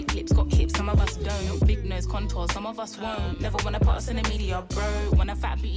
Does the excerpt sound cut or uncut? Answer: uncut